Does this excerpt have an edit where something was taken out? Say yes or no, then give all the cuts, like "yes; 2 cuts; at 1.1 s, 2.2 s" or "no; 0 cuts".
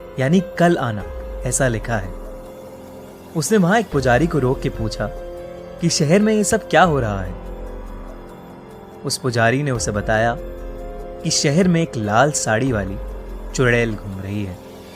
yes; 1 cut; at 2.6 s